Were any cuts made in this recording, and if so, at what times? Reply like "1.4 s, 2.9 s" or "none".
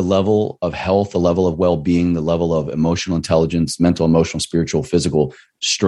none